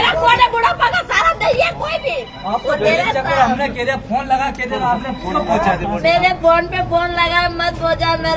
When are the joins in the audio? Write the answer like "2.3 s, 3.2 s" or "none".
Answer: none